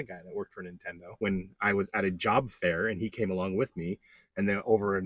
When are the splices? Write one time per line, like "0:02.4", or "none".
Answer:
0:01.1